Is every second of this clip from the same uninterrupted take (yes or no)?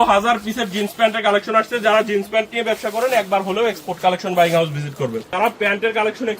no